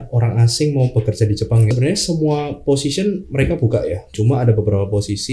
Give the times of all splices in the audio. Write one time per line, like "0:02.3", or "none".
0:01.7
0:04.1